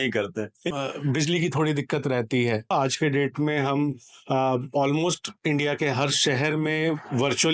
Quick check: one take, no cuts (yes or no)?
no